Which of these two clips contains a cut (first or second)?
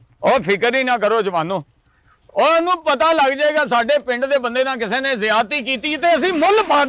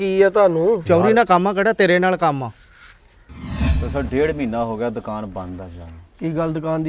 second